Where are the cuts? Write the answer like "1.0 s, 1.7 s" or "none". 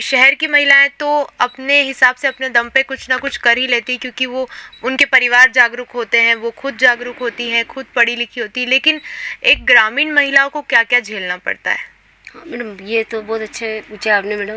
none